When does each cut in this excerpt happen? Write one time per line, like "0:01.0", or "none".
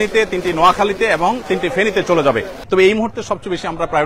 0:02.5